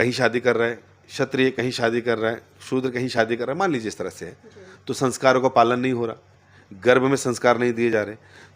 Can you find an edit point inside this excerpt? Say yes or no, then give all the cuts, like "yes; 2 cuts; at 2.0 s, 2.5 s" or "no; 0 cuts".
no; 0 cuts